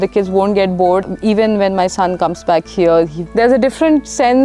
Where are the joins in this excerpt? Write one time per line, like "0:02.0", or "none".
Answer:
0:01.0
0:03.2